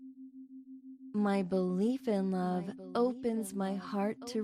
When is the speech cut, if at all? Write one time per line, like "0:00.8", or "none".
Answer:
0:01.1